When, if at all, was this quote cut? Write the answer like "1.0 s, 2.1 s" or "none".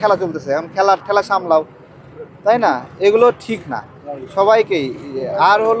none